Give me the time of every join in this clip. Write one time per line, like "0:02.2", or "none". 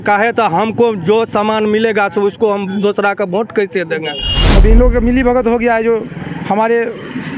0:04.4